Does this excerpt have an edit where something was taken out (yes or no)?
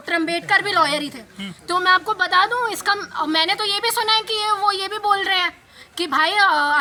no